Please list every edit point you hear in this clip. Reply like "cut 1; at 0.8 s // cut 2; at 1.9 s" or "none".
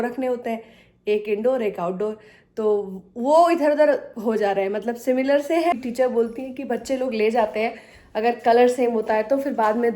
cut 1; at 5.7 s